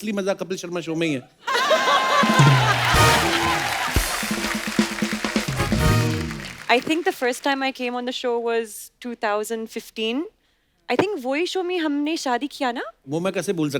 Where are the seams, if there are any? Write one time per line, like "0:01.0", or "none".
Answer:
none